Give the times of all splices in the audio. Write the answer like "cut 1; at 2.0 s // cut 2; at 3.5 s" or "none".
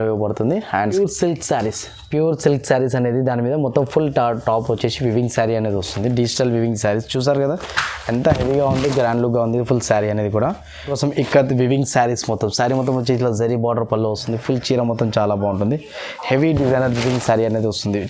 cut 1; at 0.9 s // cut 2; at 10.9 s